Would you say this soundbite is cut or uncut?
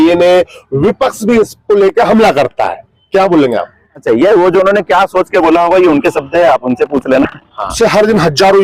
cut